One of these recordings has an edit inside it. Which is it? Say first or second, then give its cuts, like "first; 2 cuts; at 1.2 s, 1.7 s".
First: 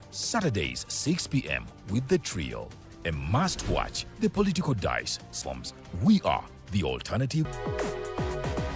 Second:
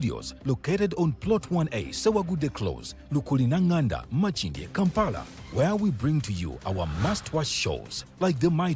first; 2 cuts; at 5.4 s, 7.5 s